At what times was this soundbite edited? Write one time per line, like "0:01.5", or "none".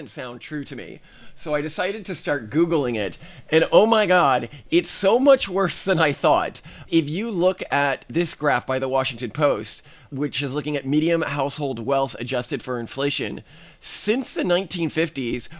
none